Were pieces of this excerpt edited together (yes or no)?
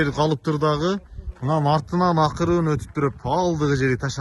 no